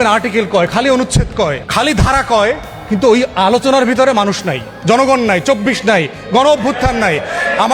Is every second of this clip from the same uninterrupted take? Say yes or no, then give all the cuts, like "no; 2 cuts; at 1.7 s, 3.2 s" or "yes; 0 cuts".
no; 1 cut; at 1.6 s